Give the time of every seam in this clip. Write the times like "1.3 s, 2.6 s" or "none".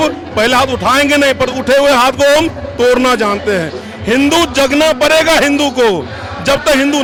none